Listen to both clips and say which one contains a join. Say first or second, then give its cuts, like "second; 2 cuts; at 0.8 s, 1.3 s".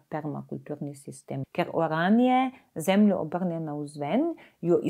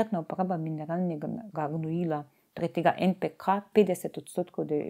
first; 1 cut; at 1.4 s